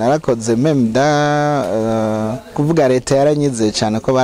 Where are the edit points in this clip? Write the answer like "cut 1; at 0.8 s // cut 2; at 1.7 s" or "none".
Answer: cut 1; at 2.6 s